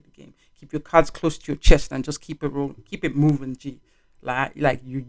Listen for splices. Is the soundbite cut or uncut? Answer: uncut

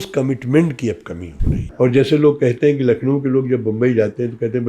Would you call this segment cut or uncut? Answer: cut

